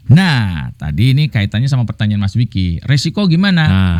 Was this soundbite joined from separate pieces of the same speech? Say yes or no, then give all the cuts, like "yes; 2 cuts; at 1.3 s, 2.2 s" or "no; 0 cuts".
no; 0 cuts